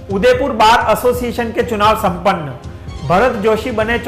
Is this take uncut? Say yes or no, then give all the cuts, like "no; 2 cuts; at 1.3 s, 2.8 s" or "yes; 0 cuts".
yes; 0 cuts